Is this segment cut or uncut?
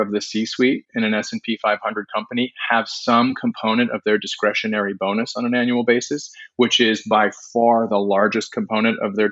uncut